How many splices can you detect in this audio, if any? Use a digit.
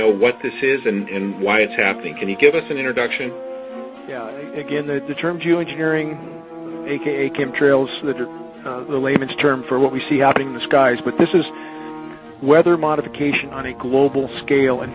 0